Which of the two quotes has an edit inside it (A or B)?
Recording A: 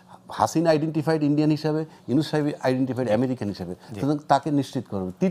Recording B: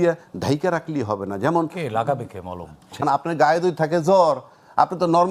B